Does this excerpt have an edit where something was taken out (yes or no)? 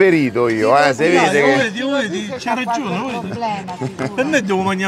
no